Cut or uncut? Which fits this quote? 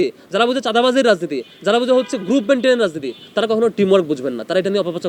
uncut